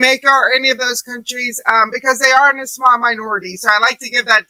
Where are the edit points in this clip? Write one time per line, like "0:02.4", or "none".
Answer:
none

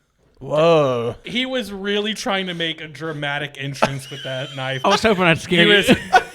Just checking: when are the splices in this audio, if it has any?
0:01.2
0:04.8

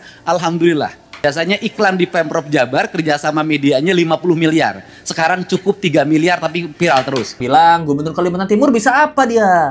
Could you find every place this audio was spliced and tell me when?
0:01.2
0:07.4

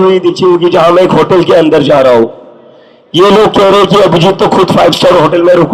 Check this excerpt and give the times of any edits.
none

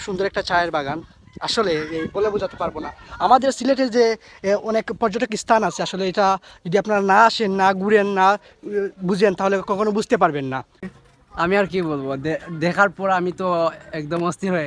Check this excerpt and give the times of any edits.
0:10.8

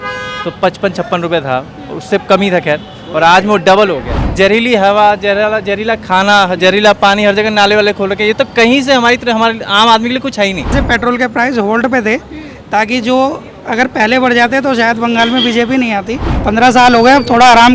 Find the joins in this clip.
0:04.2
0:10.7
0:16.2

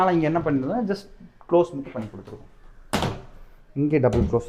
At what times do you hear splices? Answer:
none

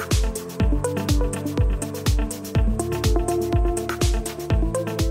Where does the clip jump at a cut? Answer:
none

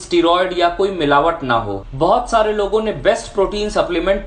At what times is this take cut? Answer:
0:01.8

